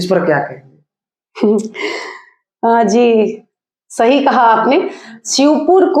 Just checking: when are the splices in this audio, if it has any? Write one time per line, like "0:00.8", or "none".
none